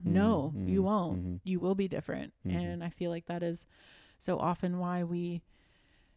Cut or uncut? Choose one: uncut